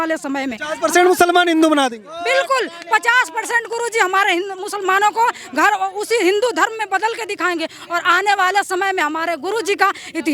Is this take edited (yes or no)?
no